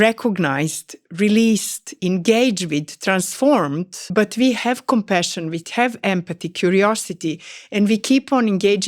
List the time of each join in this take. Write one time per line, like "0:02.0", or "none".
0:03.9